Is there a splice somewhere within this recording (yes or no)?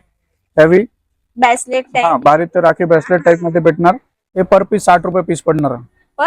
yes